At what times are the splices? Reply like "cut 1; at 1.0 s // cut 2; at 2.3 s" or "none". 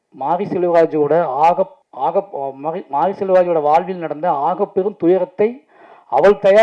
cut 1; at 1.8 s